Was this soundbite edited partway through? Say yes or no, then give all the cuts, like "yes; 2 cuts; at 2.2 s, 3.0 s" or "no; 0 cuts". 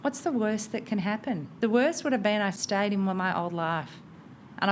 yes; 2 cuts; at 1.5 s, 2.6 s